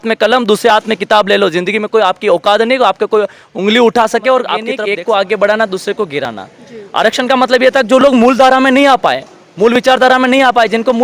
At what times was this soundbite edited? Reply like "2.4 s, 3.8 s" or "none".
4.7 s